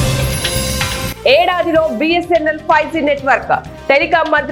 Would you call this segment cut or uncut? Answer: uncut